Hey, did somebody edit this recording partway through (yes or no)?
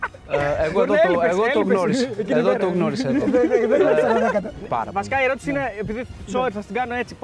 yes